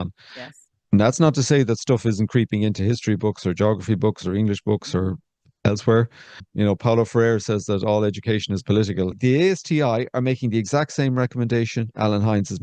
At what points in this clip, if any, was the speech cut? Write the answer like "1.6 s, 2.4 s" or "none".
6.5 s, 9.1 s